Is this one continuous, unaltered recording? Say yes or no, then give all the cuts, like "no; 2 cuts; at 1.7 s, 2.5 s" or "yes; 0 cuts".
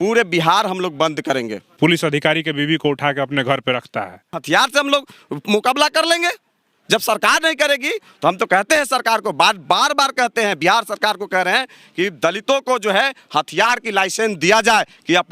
no; 2 cuts; at 1.7 s, 4.4 s